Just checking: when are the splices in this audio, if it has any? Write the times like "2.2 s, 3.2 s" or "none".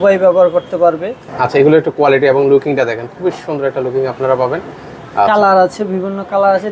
1.1 s